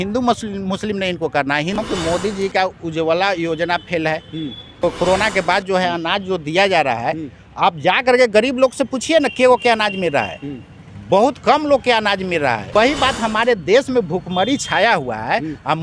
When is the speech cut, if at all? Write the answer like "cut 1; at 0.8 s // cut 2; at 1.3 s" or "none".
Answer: cut 1; at 1.8 s // cut 2; at 4.8 s // cut 3; at 12.7 s